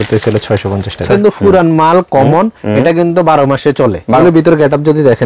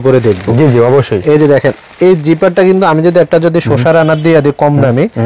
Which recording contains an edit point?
first; 2 cuts; at 1.1 s, 4.2 s

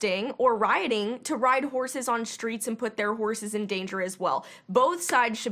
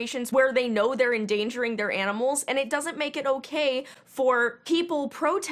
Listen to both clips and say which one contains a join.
first; 1 cut; at 4.6 s

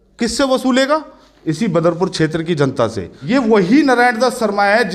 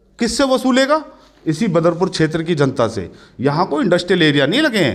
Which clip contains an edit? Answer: first; 1 cut; at 3.1 s

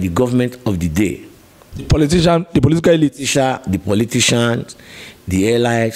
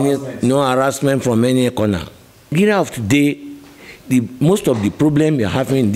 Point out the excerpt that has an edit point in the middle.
second; 1 cut; at 2.5 s

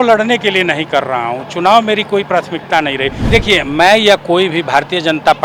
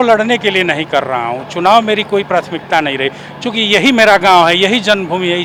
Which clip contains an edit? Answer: first; 1 cut; at 3.2 s

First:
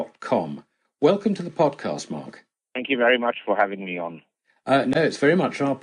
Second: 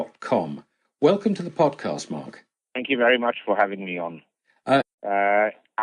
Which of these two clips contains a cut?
first; 1 cut; at 4.8 s

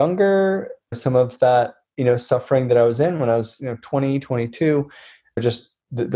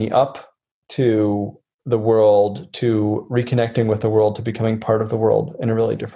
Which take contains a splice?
first; 2 cuts; at 1.0 s, 5.4 s

